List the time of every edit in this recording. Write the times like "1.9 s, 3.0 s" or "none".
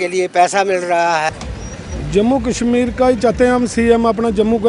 1.3 s